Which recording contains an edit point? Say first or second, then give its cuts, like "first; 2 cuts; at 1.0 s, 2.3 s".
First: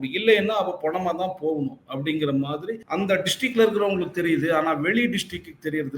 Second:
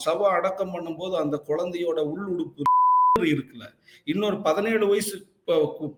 first; 1 cut; at 2.8 s